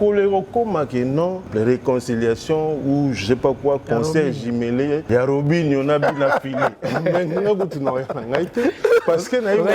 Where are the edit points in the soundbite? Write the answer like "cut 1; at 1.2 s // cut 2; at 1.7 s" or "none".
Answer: cut 1; at 1.5 s // cut 2; at 5.0 s